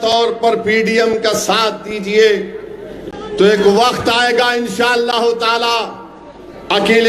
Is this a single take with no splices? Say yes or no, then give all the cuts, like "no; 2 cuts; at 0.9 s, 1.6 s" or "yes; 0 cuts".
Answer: yes; 0 cuts